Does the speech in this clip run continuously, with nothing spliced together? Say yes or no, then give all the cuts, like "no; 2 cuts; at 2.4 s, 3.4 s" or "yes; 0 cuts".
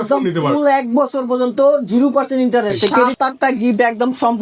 no; 1 cut; at 3.1 s